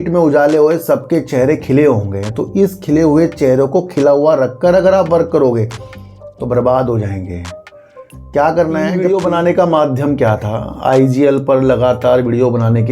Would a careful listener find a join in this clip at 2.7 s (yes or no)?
no